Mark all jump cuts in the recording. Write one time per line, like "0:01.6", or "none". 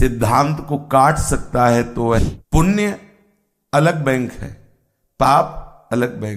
0:02.2